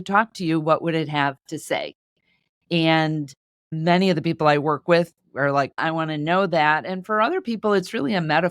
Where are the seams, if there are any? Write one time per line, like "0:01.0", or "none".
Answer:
0:05.8